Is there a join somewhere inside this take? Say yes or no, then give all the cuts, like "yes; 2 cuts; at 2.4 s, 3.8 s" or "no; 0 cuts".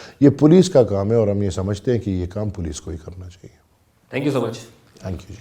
no; 0 cuts